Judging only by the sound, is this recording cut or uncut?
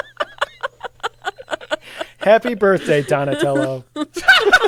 uncut